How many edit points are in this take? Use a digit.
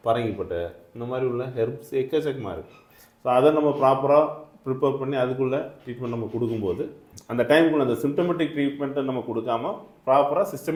0